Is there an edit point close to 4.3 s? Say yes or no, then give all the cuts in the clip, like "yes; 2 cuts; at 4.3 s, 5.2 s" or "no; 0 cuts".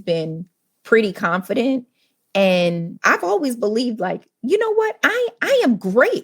no; 1 cut; at 2.9 s